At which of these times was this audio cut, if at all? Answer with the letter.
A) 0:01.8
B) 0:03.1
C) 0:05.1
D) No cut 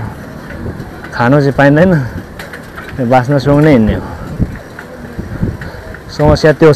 D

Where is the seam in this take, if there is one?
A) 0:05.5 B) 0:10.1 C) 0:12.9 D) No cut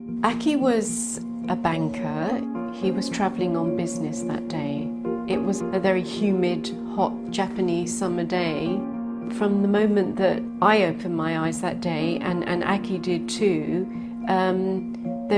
A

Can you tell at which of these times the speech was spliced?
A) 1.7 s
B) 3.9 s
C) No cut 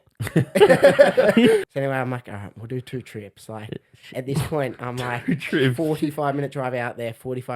A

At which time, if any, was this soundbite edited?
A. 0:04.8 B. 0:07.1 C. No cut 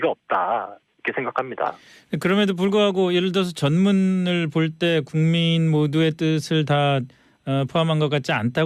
A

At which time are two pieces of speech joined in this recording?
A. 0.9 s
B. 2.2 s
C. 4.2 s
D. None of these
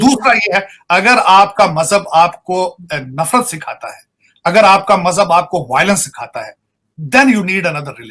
D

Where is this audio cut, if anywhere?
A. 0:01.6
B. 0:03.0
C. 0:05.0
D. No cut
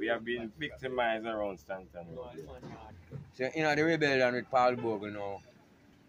B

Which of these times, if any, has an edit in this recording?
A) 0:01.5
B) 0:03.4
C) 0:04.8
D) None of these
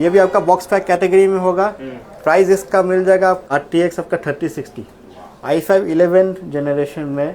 B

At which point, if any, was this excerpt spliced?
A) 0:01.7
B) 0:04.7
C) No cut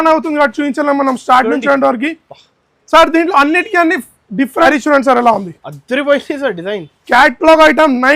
B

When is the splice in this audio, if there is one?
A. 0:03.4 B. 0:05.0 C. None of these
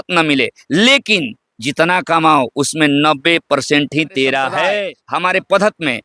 B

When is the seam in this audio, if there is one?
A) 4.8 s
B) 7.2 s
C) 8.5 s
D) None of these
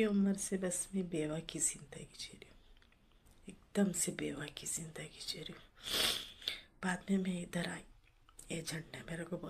D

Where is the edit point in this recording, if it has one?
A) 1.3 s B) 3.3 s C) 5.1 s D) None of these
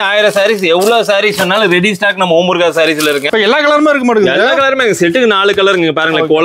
B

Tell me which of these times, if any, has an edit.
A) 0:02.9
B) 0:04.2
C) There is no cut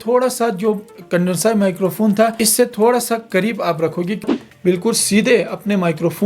B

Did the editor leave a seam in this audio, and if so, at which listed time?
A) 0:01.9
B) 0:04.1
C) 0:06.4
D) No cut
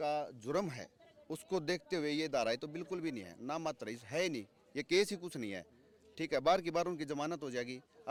D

